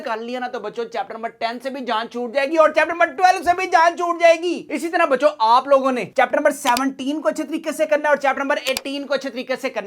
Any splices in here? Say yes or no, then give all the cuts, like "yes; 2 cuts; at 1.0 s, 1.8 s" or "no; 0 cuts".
no; 0 cuts